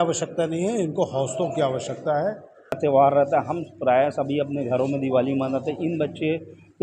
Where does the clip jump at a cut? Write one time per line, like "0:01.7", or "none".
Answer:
0:02.8